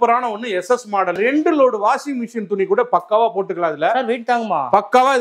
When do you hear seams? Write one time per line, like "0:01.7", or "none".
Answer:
0:01.2